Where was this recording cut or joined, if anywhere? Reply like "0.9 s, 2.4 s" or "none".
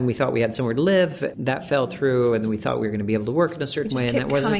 1.3 s